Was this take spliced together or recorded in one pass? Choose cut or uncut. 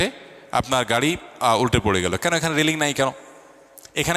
uncut